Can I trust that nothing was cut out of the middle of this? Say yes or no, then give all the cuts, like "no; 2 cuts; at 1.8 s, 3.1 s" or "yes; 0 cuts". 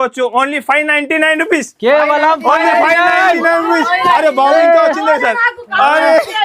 yes; 0 cuts